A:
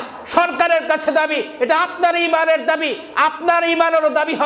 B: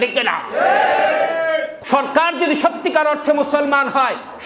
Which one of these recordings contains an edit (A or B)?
B